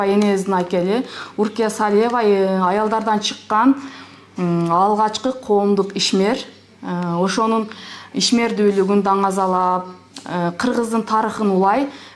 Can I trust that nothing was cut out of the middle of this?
yes; 0 cuts

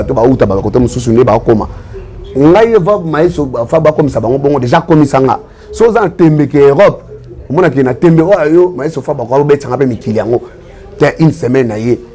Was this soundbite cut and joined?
no; 0 cuts

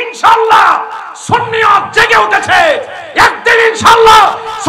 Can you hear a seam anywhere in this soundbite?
no; 0 cuts

